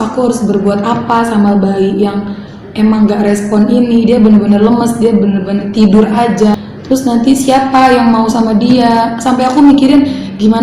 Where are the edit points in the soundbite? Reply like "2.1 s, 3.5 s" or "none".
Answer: 6.6 s